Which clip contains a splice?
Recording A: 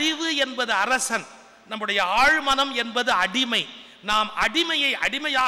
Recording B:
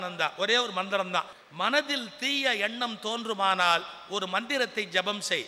B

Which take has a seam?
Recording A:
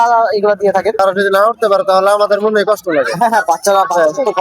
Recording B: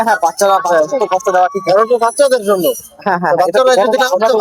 A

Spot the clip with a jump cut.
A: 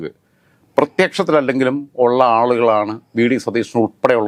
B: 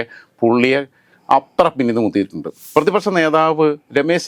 B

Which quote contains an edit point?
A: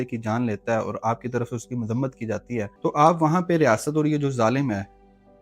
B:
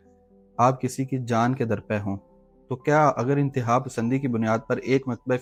A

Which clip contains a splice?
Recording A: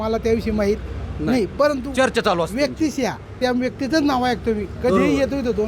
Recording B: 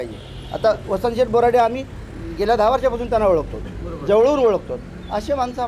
A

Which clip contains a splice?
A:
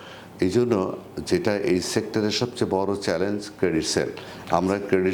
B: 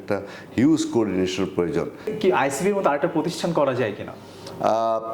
B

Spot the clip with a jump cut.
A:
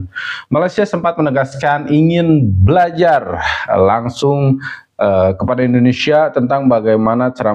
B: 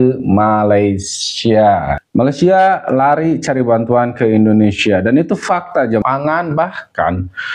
B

